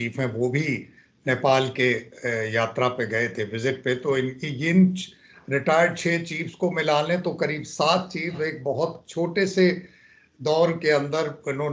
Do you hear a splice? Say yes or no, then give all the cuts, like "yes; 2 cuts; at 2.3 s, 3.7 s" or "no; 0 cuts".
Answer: no; 0 cuts